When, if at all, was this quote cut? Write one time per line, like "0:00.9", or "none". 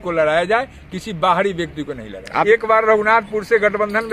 0:02.4